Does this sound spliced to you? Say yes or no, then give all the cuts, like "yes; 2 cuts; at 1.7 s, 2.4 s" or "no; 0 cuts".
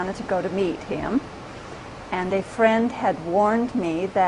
no; 0 cuts